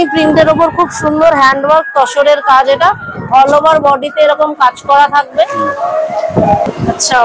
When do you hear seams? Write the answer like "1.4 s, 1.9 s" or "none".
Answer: 5.4 s

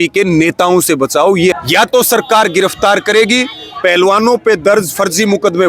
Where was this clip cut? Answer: 1.6 s

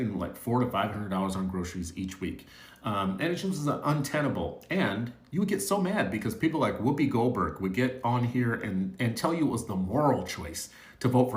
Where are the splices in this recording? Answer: none

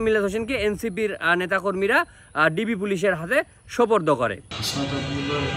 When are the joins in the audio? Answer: 4.5 s

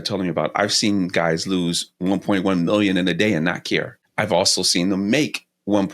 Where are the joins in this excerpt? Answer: 4.0 s

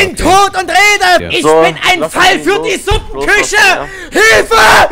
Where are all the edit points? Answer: 1.3 s

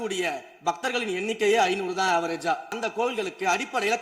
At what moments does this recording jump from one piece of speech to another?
2.8 s

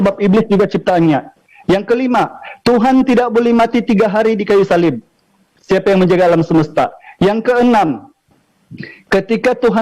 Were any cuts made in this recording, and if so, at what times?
none

